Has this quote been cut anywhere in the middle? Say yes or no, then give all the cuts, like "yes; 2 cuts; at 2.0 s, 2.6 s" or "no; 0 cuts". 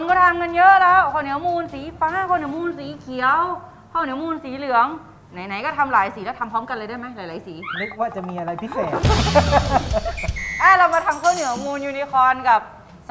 no; 0 cuts